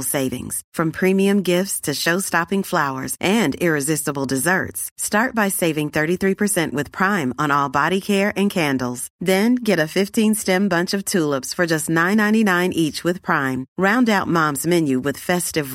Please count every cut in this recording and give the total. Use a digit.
0